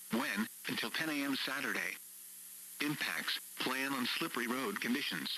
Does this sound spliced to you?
yes; 1 cut; at 3.4 s

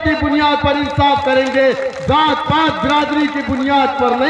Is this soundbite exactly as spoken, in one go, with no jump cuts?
yes; 0 cuts

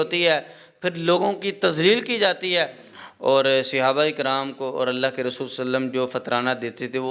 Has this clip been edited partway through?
yes; 1 cut; at 2.9 s

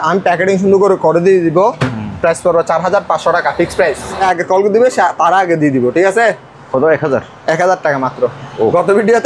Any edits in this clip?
yes; 1 cut; at 4.2 s

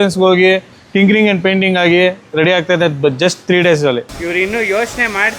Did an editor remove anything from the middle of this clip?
yes; 1 cut; at 4.1 s

